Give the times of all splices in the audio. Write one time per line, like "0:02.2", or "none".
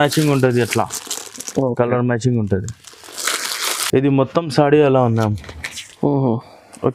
0:03.7